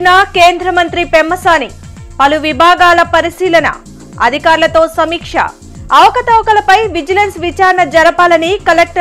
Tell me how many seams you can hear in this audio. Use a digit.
0